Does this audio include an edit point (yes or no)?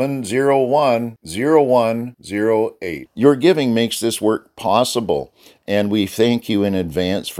no